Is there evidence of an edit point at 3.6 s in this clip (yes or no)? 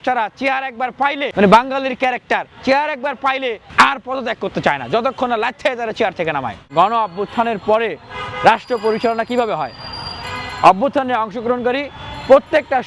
yes